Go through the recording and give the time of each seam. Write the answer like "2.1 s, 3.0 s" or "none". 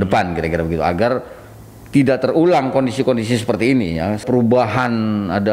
4.2 s